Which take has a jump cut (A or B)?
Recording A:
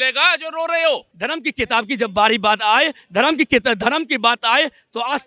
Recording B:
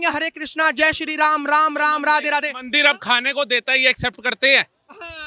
A